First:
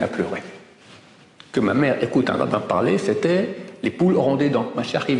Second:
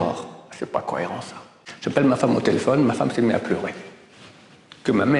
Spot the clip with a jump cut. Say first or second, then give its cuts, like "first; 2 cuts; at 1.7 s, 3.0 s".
second; 1 cut; at 1.6 s